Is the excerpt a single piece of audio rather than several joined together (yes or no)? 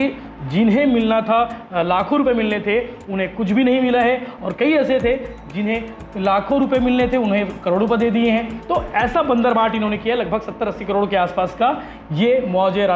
yes